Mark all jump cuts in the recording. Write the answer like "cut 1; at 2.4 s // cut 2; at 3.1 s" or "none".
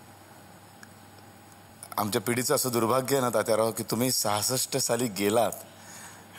cut 1; at 1.7 s